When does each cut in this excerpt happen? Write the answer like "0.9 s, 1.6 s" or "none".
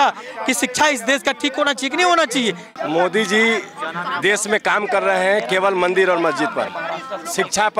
2.7 s